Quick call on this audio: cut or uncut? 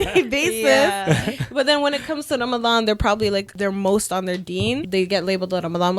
cut